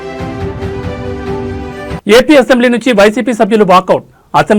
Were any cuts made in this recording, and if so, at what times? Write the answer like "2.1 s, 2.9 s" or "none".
2.0 s